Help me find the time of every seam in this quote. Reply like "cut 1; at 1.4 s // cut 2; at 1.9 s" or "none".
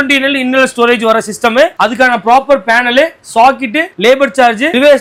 none